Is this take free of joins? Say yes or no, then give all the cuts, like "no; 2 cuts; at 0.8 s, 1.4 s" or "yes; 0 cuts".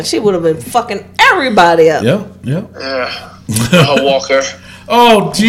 yes; 0 cuts